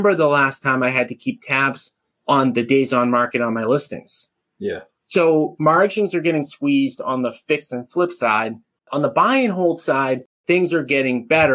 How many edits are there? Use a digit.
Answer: 1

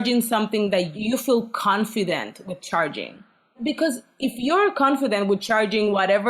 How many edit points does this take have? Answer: 1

